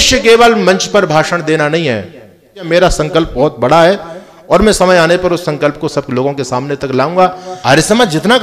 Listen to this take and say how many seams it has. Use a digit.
3